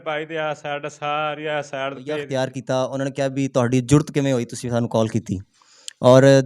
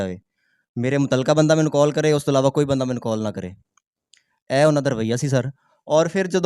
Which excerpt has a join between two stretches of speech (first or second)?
first